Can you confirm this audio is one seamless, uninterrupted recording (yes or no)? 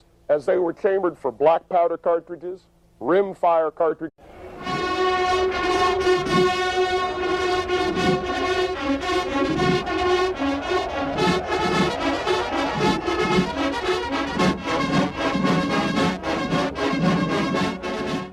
yes